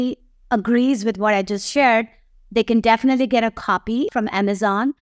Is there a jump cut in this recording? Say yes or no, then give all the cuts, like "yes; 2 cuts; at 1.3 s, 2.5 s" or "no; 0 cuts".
yes; 1 cut; at 4.1 s